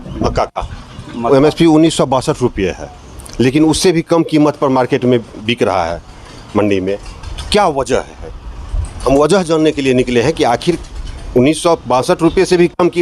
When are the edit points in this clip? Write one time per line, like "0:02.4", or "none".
0:01.2